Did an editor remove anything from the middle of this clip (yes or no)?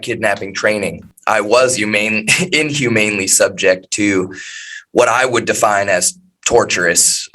yes